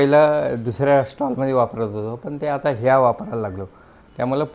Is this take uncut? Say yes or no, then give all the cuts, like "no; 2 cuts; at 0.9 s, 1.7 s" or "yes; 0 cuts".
yes; 0 cuts